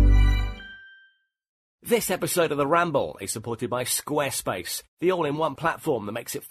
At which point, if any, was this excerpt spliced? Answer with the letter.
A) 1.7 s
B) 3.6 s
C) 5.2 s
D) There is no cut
A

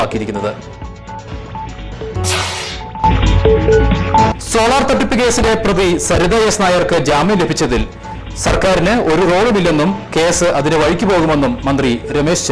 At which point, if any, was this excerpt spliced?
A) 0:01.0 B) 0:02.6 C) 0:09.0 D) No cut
D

